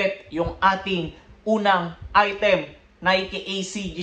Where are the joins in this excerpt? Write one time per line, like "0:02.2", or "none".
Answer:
none